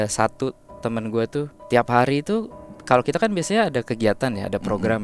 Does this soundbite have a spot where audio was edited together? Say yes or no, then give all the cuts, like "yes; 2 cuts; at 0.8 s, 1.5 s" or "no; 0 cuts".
yes; 1 cut; at 1.6 s